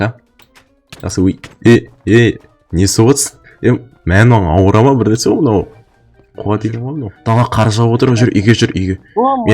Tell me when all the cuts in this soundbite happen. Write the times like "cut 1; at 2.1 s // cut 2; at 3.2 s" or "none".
cut 1; at 7.1 s